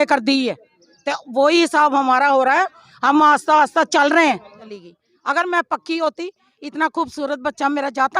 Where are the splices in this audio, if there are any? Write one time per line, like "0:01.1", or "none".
0:04.6